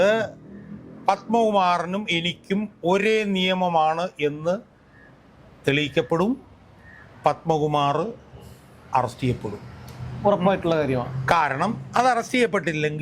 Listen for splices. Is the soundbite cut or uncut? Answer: uncut